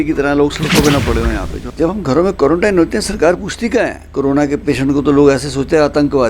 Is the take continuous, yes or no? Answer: no